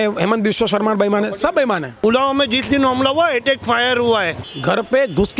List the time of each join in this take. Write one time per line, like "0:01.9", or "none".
0:01.9
0:04.4